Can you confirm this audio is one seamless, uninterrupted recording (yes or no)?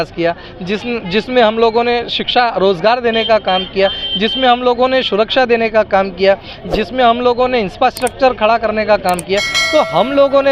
yes